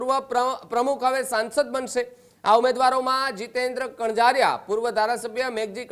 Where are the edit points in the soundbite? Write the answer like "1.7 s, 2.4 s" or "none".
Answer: none

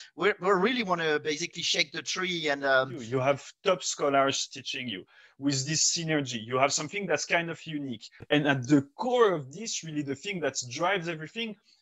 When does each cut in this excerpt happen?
3.0 s, 8.1 s

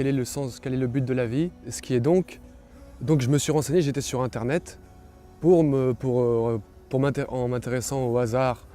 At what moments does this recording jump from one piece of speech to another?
1.7 s

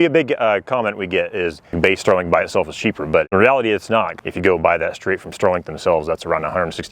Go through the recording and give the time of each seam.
1.7 s, 4.2 s

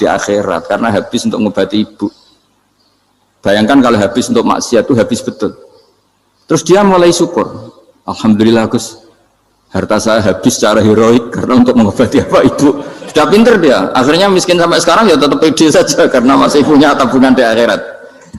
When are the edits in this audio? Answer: none

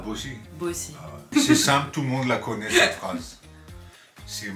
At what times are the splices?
1.3 s

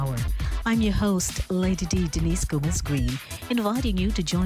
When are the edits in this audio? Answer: 1.2 s

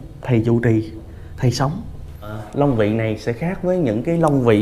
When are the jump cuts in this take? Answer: 2.4 s

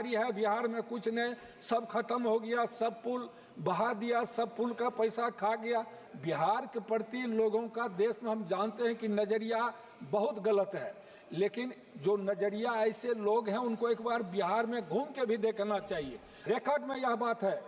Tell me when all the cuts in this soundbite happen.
6.0 s, 16.5 s

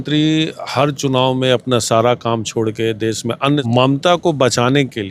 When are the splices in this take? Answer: 3.6 s

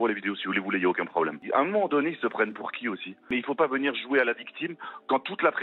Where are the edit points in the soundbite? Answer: 1.4 s, 3.2 s

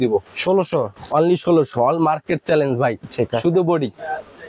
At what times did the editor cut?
none

